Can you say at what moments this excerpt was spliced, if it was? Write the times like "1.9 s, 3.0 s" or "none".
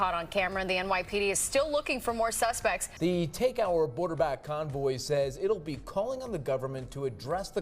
2.9 s